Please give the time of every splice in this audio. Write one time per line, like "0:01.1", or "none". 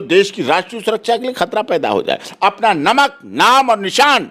0:02.3